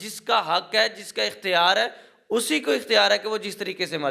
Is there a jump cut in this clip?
no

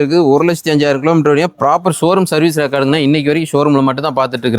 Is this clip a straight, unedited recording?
yes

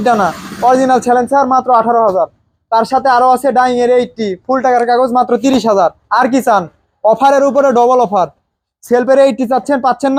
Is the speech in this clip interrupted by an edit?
no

